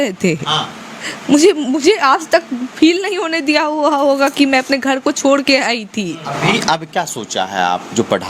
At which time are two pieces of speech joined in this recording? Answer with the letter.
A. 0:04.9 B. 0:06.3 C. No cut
B